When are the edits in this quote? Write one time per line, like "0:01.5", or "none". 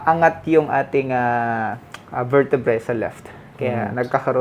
none